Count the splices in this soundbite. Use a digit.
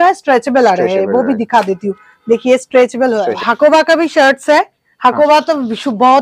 1